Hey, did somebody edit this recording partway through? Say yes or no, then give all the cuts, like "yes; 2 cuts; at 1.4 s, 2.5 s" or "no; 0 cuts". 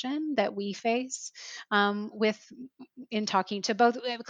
no; 0 cuts